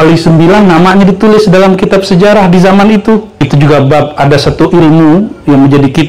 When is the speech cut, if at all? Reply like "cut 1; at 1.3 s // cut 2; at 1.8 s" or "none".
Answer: cut 1; at 3.4 s